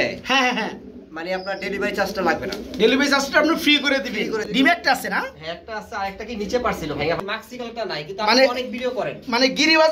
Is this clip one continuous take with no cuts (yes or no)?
no